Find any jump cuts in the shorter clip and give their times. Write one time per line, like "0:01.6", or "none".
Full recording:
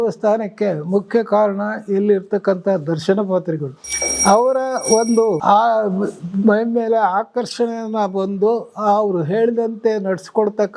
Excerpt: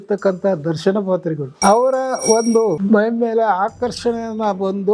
0:01.5
0:02.8